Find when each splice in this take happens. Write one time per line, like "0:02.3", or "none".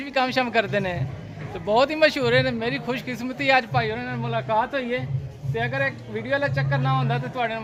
none